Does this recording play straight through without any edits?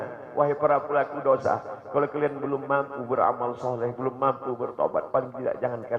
yes; 0 cuts

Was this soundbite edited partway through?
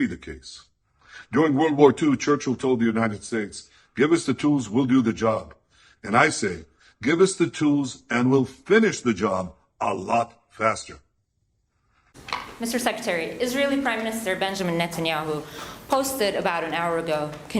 yes; 1 cut; at 12.2 s

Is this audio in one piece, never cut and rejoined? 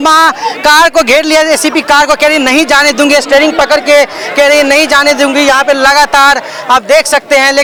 yes; 0 cuts

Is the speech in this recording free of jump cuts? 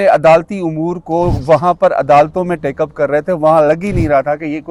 yes; 0 cuts

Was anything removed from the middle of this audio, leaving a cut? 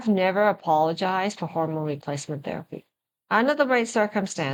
no; 0 cuts

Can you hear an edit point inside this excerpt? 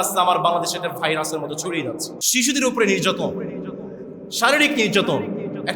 yes; 1 cut; at 2.2 s

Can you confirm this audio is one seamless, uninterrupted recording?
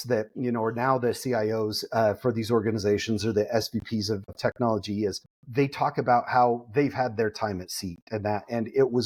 yes; 0 cuts

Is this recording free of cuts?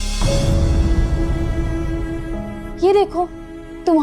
yes; 0 cuts

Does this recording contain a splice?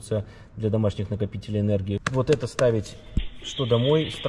yes; 1 cut; at 2.0 s

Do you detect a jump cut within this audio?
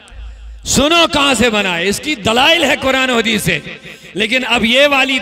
no; 0 cuts

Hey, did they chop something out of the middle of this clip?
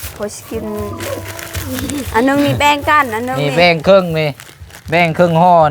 no; 0 cuts

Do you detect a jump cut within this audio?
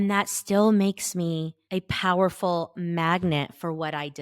yes; 1 cut; at 1.6 s

